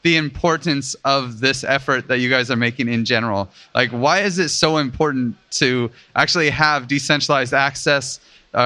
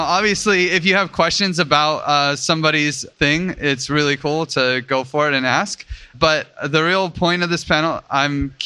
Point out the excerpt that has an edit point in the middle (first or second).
second